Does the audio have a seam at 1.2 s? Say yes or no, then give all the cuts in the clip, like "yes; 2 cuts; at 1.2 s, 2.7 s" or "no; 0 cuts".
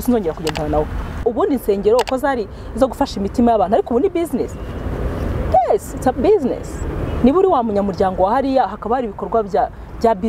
yes; 1 cut; at 1.2 s